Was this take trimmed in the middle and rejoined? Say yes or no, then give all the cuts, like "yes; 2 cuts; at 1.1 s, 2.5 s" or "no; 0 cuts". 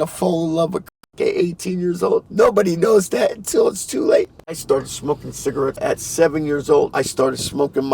yes; 4 cuts; at 2.3 s, 4.6 s, 5.8 s, 6.9 s